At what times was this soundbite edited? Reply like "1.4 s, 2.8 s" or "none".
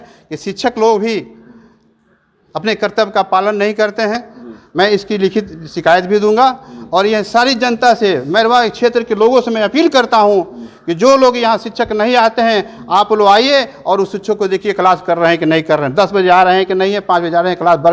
none